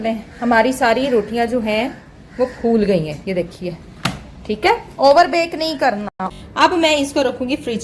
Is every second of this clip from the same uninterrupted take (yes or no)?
no